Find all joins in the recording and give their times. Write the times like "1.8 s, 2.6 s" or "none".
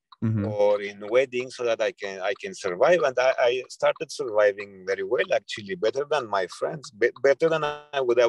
none